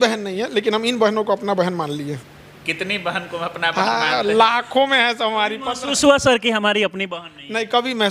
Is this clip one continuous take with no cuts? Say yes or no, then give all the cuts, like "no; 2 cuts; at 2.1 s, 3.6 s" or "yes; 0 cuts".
yes; 0 cuts